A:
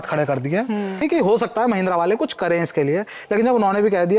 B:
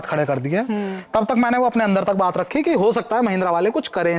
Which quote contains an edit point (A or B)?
A